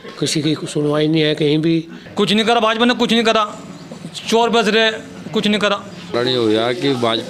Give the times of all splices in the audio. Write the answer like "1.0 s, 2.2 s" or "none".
2.0 s, 6.1 s